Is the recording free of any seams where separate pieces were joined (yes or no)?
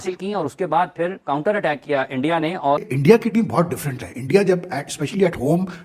no